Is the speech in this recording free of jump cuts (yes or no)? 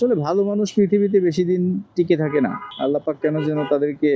yes